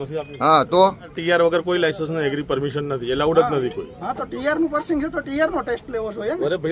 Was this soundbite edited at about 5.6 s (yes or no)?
no